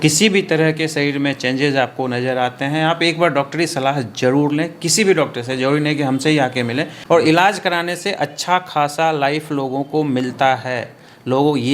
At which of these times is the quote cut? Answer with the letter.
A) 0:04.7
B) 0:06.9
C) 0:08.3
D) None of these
B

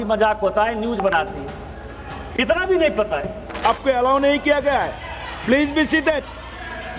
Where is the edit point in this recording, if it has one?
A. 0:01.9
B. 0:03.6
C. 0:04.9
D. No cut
B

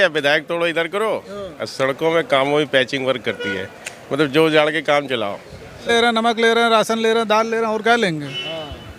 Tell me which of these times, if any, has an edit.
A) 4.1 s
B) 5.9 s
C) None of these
B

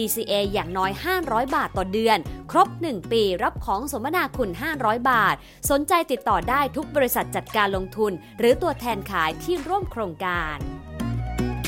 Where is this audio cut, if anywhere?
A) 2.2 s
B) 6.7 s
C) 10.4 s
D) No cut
C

